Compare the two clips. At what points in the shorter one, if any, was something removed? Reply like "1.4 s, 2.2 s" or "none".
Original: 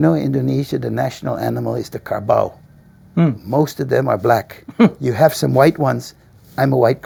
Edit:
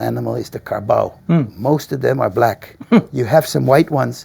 1.2 s